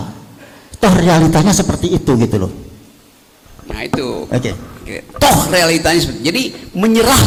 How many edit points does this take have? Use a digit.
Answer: 0